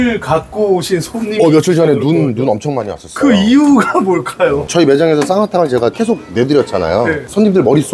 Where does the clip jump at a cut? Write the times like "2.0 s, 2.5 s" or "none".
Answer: none